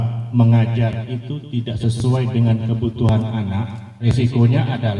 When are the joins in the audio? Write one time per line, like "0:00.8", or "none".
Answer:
0:04.0